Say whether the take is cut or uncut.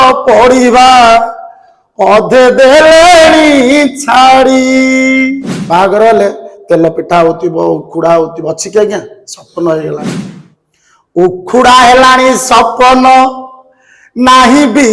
cut